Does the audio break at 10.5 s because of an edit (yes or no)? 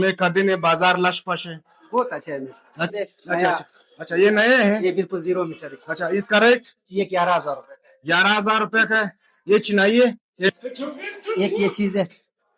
yes